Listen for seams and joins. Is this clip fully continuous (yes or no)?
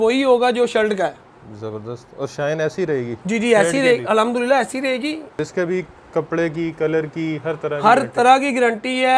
no